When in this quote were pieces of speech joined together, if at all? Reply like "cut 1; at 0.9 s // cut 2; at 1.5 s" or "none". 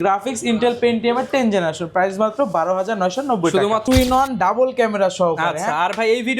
cut 1; at 3.8 s